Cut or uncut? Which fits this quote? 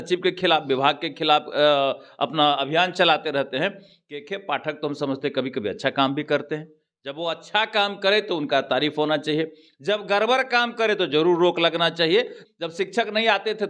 cut